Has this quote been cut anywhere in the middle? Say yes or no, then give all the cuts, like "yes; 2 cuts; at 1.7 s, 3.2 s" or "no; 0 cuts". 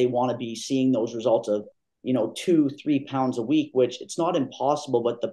no; 0 cuts